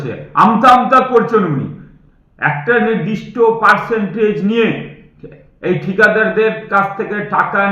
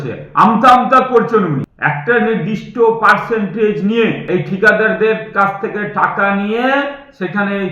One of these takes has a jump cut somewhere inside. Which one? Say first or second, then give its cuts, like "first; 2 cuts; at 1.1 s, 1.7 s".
second; 2 cuts; at 1.7 s, 4.2 s